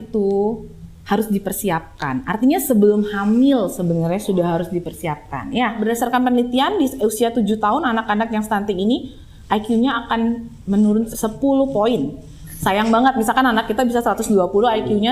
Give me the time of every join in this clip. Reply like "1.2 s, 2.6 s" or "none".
5.8 s, 11.1 s